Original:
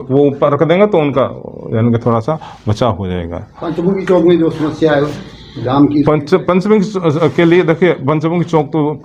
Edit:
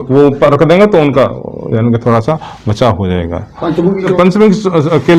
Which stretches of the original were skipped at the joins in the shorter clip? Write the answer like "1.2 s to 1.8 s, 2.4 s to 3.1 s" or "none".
4.1 s to 6.4 s

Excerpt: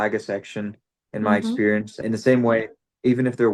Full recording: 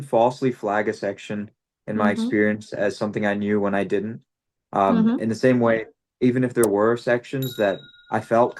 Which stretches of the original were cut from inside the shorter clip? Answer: 2.8 s to 5.2 s

